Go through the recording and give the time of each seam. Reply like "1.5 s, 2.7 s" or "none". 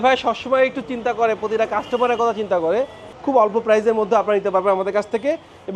3.1 s